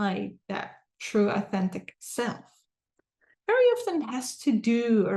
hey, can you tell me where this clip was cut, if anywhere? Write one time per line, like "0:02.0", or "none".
none